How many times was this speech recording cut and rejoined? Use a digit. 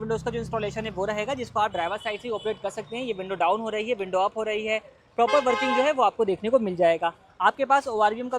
0